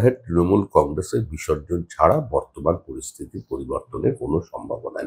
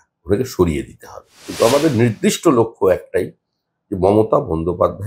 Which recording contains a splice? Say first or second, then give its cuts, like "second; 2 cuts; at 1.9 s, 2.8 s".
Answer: second; 1 cut; at 1.4 s